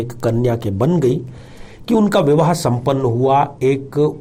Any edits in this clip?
no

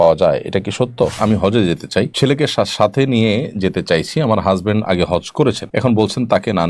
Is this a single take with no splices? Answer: no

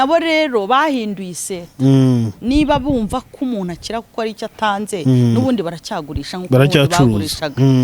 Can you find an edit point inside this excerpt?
no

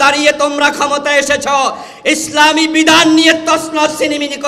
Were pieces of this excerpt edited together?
no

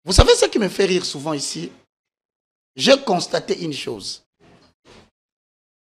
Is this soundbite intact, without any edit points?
yes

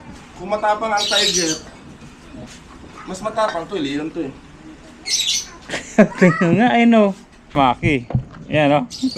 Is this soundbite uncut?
no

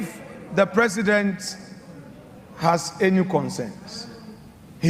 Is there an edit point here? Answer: no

